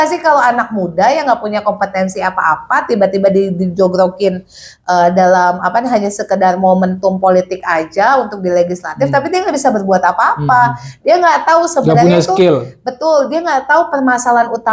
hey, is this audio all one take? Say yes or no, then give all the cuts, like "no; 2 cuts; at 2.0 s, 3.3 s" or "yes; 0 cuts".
yes; 0 cuts